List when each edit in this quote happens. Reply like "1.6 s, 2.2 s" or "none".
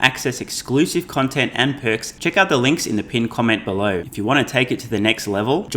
2.1 s, 4.1 s